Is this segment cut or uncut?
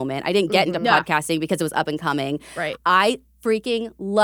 cut